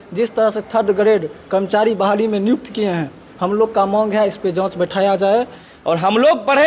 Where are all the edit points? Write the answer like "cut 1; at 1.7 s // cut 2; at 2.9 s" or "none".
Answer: cut 1; at 5.6 s